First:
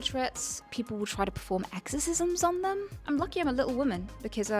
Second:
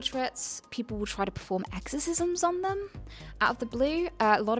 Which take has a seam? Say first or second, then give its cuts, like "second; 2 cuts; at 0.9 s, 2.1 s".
first; 1 cut; at 3.0 s